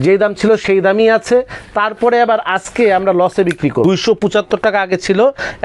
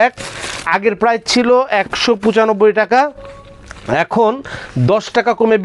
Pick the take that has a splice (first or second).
first